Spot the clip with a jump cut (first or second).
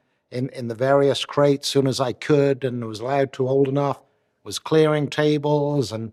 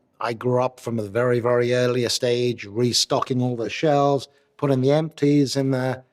second